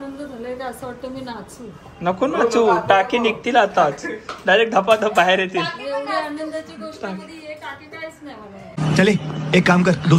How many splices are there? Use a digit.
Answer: 0